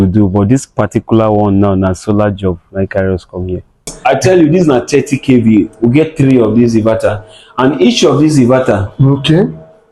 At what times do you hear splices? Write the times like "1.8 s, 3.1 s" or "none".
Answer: 3.9 s